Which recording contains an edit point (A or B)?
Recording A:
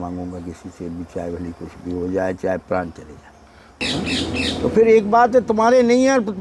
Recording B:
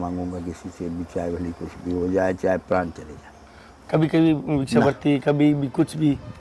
A